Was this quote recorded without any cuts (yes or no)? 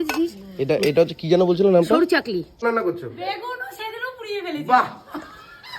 no